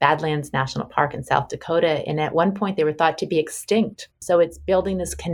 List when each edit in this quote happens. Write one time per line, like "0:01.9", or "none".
0:04.1